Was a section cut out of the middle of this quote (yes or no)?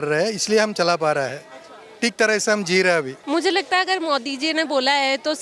yes